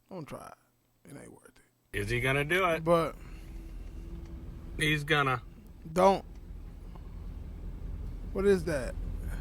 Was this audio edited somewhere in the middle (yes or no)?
yes